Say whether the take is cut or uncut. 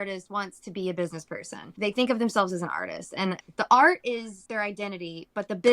cut